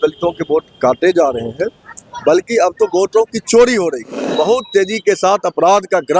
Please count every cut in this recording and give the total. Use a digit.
1